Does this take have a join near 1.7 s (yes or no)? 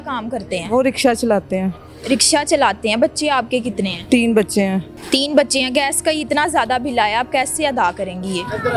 no